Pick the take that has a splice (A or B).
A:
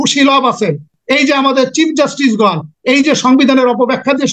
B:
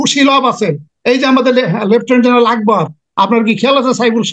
A